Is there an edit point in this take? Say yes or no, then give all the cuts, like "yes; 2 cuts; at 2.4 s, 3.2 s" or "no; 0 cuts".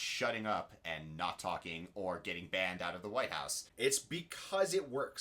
yes; 1 cut; at 3.6 s